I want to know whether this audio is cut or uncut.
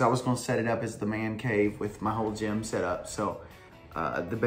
uncut